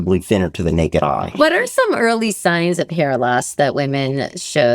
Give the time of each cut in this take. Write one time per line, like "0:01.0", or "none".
0:01.3